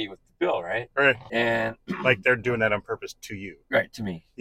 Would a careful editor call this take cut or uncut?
cut